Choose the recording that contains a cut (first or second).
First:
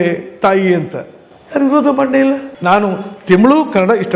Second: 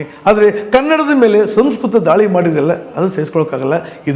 first